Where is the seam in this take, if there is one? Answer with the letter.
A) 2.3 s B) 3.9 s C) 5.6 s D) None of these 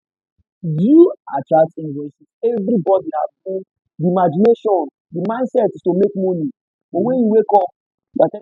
A